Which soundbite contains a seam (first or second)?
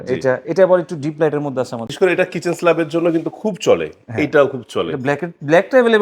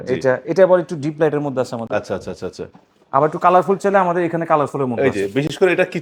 first